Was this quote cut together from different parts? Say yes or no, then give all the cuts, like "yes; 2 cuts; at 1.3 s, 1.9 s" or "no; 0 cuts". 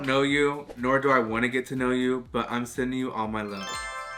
no; 0 cuts